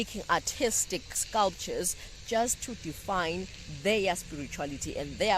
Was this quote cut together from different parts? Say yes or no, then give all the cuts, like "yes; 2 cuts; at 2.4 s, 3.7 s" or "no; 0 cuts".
yes; 1 cut; at 1.2 s